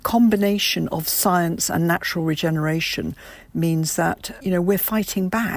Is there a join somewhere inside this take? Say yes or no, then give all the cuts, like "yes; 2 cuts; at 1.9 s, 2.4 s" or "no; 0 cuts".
yes; 1 cut; at 4.4 s